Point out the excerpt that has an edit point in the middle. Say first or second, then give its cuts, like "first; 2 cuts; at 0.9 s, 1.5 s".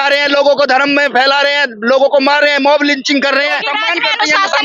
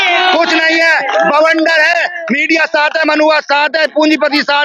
first; 1 cut; at 3.7 s